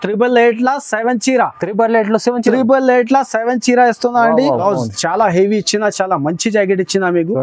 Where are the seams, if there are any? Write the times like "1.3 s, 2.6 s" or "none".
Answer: 4.6 s